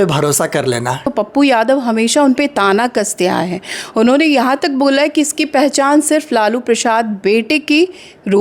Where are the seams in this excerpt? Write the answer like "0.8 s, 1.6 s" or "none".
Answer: 1.1 s